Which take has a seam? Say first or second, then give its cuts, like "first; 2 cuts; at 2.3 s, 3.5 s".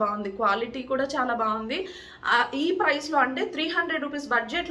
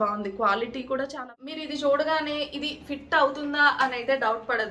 second; 1 cut; at 1.1 s